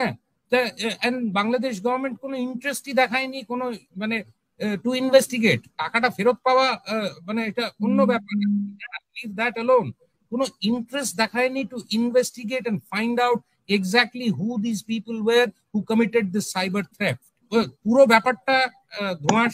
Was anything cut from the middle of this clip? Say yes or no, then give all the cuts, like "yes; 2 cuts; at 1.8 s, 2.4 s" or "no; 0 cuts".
yes; 1 cut; at 17.5 s